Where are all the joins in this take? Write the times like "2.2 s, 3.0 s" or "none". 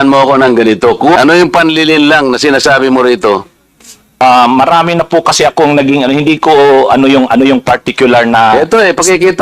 1.2 s, 4.2 s

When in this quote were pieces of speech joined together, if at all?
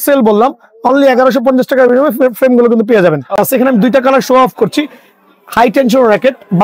3.4 s

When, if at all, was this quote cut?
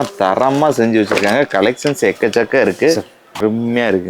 3.2 s

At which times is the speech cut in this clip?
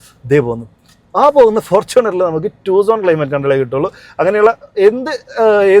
none

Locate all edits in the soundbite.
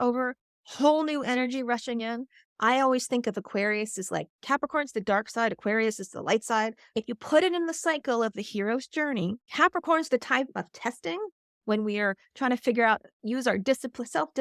6.8 s, 9.4 s

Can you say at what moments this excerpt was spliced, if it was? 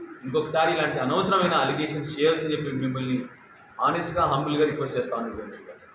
none

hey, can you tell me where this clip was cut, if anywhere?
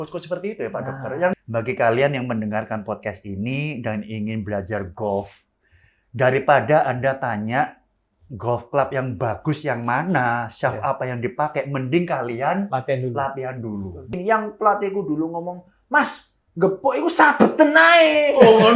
1.3 s, 14.1 s

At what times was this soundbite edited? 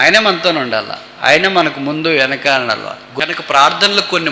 3.1 s

